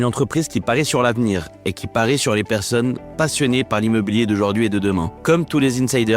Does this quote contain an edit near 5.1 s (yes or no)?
yes